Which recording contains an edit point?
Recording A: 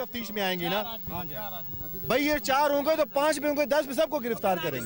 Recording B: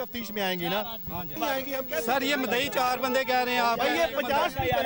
B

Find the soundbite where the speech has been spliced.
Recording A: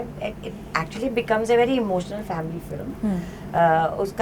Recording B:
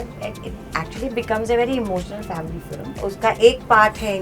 B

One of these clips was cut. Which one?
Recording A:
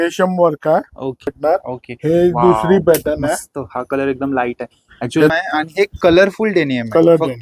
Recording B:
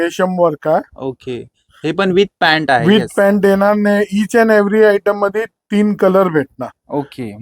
A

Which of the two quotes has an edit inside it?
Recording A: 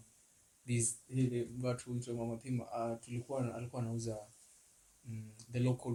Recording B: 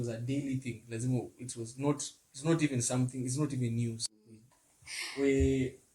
B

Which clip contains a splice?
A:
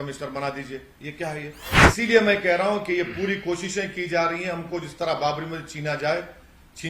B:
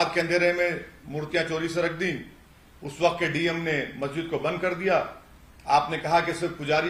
A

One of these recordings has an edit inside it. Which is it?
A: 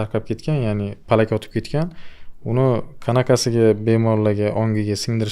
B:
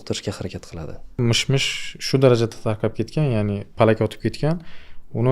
B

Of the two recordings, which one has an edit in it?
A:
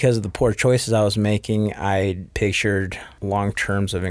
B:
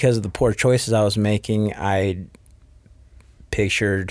A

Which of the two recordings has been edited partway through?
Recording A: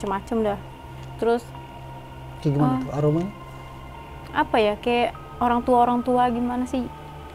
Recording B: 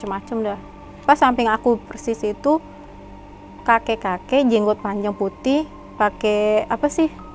B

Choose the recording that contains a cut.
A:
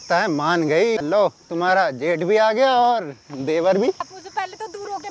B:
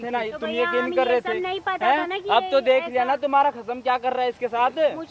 A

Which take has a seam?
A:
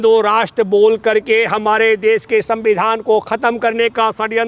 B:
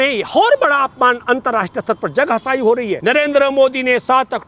B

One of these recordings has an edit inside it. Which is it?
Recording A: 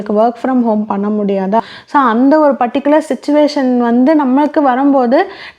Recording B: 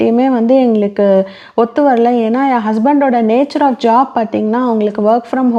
A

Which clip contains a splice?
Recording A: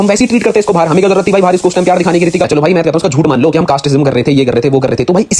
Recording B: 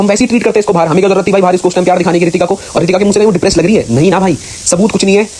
A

